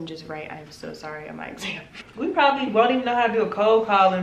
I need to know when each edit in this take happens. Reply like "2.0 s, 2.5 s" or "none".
2.0 s